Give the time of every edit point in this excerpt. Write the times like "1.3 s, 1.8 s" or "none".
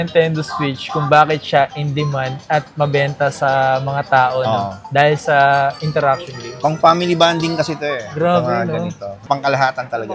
none